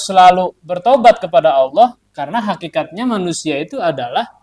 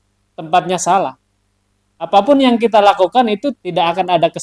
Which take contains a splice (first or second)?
second